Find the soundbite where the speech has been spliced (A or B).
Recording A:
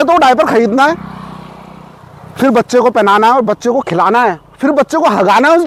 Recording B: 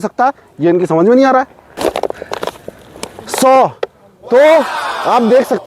B